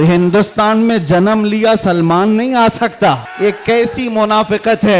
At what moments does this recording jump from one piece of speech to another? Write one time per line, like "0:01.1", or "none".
0:03.3